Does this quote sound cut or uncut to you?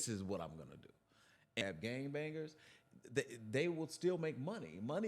cut